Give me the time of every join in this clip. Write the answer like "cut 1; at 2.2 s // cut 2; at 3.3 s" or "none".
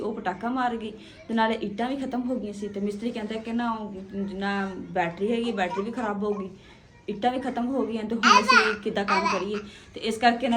none